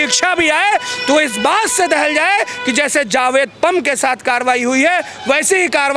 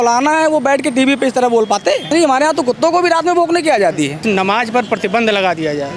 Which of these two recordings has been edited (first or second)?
second